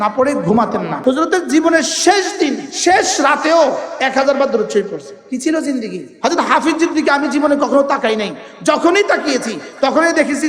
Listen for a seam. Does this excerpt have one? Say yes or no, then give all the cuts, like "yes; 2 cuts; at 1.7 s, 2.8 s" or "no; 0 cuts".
yes; 4 cuts; at 0.9 s, 2.7 s, 5.1 s, 6.0 s